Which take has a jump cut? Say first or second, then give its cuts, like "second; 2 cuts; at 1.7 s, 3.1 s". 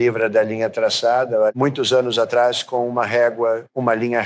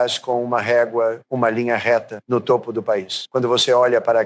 first; 1 cut; at 1.5 s